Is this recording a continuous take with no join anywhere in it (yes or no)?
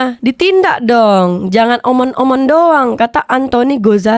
yes